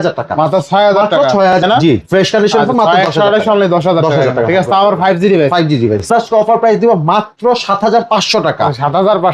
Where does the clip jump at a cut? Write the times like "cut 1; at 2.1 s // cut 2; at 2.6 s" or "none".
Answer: cut 1; at 1.6 s // cut 2; at 6.1 s